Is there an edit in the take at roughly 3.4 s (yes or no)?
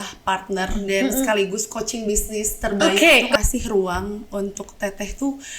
yes